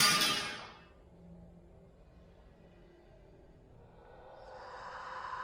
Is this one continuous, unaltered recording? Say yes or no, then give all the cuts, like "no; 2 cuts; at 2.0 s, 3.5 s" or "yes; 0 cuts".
no; 1 cut; at 4.5 s